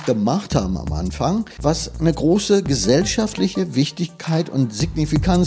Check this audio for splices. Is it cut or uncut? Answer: cut